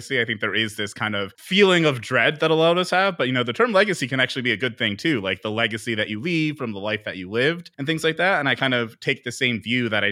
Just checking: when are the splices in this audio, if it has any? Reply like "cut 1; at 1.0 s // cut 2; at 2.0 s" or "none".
cut 1; at 1.4 s // cut 2; at 7.7 s